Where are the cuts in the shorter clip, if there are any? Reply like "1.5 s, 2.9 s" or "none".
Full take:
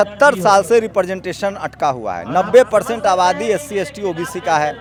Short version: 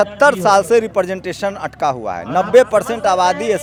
none